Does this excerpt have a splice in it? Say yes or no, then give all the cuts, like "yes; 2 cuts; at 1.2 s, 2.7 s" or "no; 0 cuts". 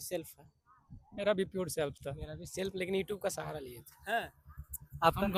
no; 0 cuts